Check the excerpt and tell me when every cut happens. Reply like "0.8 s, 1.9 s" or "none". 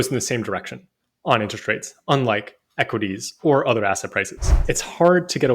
4.6 s